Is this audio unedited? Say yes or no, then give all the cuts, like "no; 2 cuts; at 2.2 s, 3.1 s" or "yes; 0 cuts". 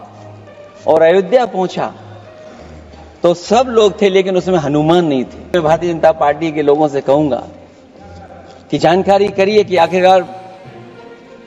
no; 1 cut; at 5.5 s